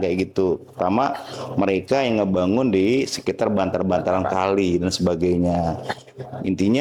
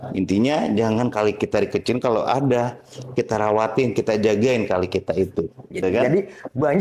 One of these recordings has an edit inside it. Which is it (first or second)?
second